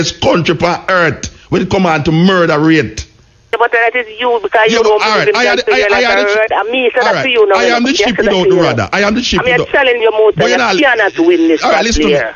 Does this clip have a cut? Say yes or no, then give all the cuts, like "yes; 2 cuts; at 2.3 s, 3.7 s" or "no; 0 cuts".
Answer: yes; 1 cut; at 3.5 s